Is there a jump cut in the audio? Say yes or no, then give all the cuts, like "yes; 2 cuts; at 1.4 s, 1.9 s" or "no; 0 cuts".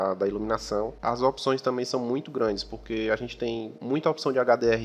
yes; 2 cuts; at 1.0 s, 3.7 s